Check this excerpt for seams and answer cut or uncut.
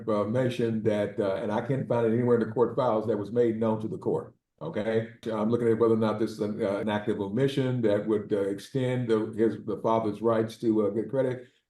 cut